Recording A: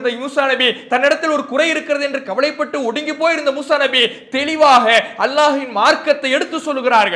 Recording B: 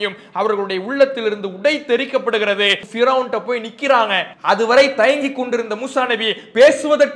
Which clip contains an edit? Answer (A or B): B